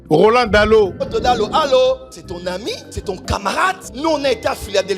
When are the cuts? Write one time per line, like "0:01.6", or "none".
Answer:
0:01.1